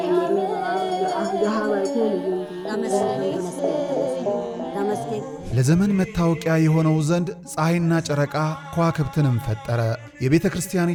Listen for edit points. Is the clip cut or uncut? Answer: uncut